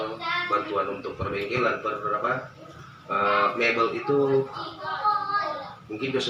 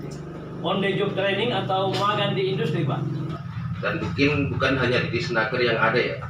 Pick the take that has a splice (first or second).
second